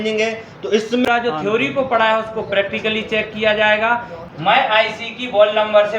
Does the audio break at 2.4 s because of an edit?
no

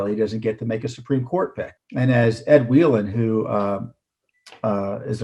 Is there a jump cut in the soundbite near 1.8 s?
yes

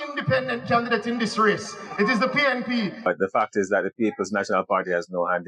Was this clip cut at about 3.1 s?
yes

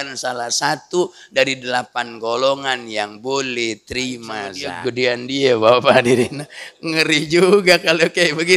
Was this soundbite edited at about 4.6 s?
yes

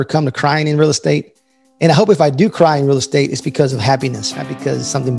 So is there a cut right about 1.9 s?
no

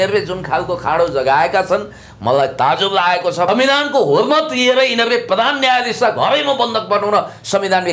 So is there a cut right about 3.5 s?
yes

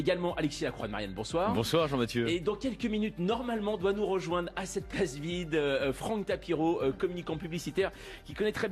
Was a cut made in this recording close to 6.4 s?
yes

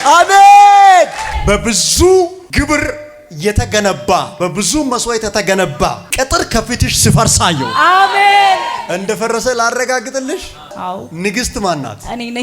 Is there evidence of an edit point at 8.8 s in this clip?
yes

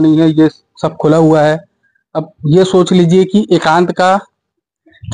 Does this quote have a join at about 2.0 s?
no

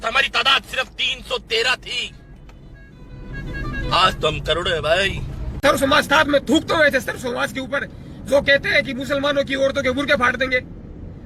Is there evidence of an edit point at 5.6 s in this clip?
yes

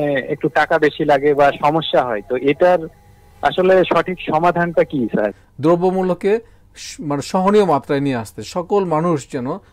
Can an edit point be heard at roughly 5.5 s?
yes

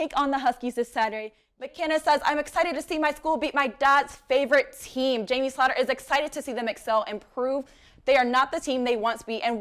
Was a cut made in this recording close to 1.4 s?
yes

